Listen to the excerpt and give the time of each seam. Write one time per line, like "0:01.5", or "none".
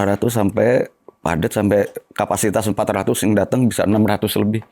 none